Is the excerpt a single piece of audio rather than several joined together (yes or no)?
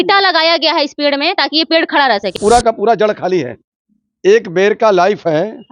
no